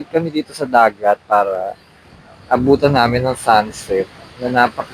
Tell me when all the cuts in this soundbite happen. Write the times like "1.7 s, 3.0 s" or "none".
none